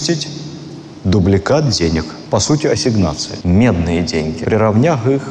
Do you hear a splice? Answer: no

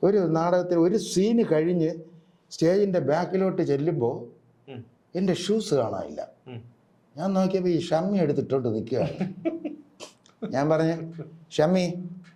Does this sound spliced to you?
no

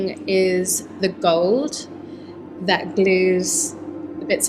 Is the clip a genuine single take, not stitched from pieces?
yes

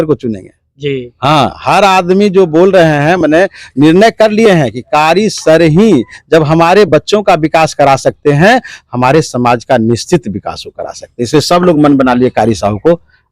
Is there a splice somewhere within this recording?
no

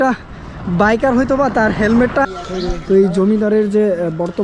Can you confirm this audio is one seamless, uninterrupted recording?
no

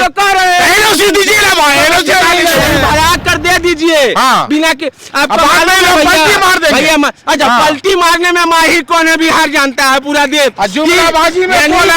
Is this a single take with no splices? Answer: no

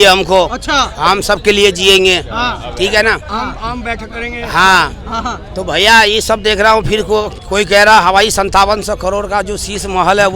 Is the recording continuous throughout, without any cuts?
yes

